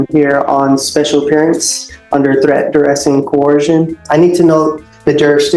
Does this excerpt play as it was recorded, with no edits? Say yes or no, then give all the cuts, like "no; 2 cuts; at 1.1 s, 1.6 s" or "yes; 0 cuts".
no; 1 cut; at 4.0 s